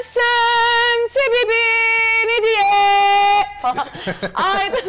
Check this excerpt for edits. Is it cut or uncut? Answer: uncut